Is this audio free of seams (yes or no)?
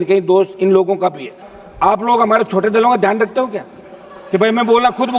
no